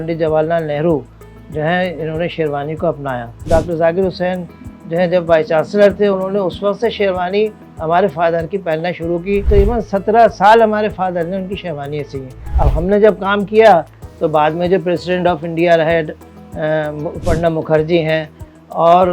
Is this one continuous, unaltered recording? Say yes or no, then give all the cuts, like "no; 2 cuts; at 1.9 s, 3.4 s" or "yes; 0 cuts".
no; 3 cuts; at 3.4 s, 9.5 s, 12.4 s